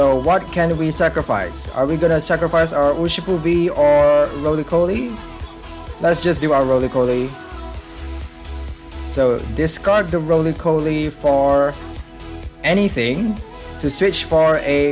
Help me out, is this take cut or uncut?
uncut